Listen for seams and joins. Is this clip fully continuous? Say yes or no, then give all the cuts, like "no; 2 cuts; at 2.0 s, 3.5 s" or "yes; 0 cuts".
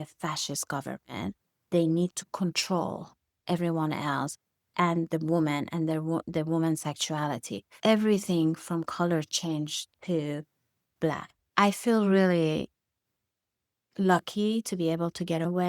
no; 1 cut; at 11.5 s